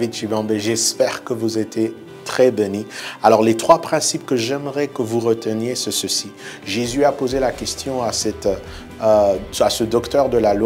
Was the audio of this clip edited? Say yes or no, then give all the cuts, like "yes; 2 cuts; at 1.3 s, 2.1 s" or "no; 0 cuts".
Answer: yes; 1 cut; at 3.0 s